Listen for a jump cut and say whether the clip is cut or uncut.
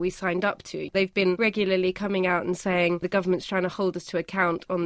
cut